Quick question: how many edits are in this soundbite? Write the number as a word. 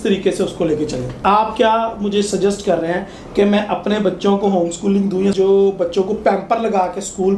two